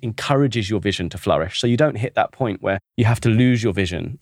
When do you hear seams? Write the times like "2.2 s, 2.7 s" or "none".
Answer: 2.9 s